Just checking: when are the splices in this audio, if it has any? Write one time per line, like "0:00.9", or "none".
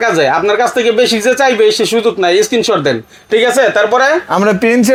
none